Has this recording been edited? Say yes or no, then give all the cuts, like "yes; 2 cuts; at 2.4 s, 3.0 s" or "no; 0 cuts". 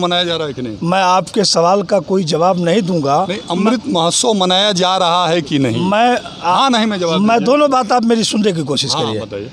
no; 0 cuts